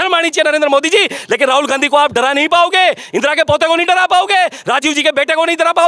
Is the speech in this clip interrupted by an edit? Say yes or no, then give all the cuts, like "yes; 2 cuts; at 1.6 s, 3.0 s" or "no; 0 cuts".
no; 0 cuts